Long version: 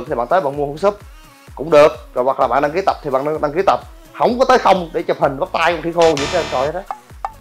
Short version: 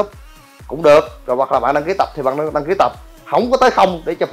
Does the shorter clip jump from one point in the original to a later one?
no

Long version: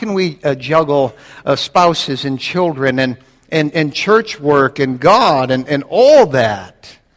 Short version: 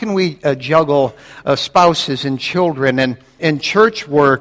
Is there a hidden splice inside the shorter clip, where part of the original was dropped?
yes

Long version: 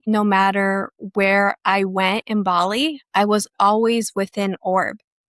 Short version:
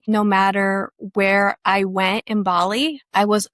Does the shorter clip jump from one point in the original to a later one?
no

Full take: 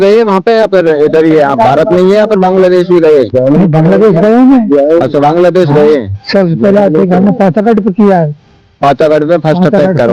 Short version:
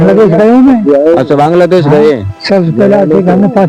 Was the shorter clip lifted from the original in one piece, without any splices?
yes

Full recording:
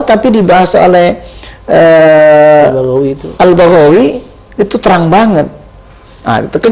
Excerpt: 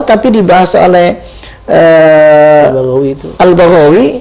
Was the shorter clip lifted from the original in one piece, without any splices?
yes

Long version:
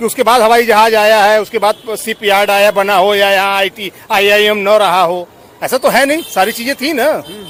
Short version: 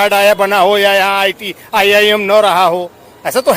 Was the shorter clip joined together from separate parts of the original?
no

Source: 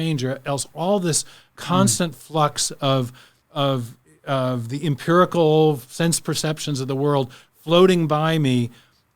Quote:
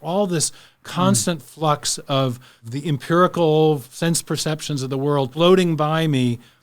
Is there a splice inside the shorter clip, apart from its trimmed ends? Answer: yes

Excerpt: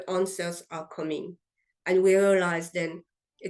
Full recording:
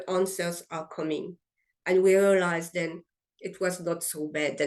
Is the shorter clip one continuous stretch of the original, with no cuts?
yes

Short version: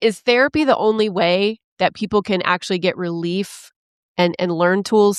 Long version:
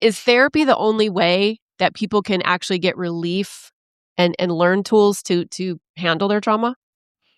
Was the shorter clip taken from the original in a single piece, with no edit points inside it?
yes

